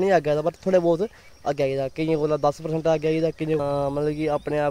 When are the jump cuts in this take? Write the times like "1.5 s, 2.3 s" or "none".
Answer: 3.6 s

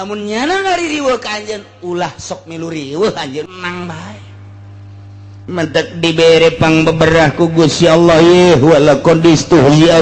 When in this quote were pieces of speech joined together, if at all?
3.5 s

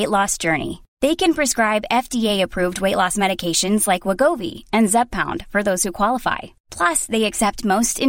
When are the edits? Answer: none

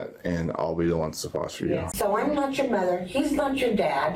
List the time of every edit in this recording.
1.9 s

